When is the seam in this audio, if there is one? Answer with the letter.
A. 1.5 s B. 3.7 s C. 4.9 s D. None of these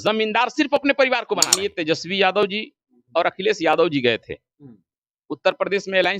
A